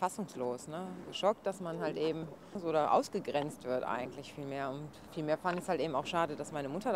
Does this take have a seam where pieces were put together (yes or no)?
yes